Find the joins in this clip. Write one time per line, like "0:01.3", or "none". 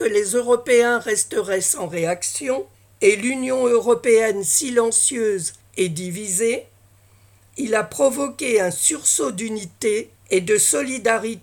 0:02.8
0:05.6
0:10.2